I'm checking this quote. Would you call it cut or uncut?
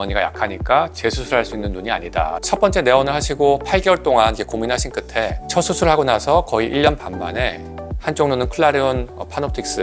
cut